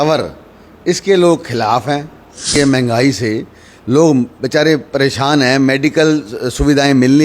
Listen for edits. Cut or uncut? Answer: cut